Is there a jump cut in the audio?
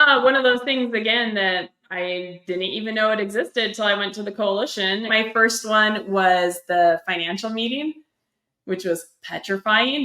yes; 1 cut; at 5.1 s

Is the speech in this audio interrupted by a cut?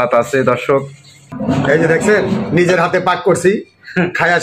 yes; 1 cut; at 1.3 s

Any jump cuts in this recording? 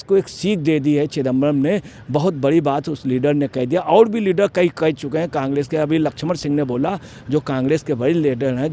no; 0 cuts

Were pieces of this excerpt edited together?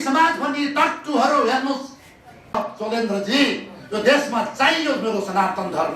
yes; 1 cut; at 2.4 s

